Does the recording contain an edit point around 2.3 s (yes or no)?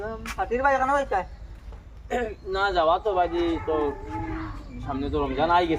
no